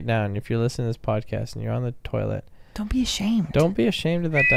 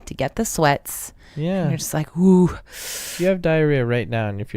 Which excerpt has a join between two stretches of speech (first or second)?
second